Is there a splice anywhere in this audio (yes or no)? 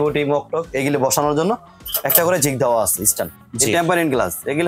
yes